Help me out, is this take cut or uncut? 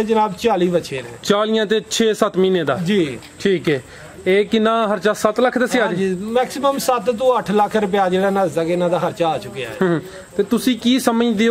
uncut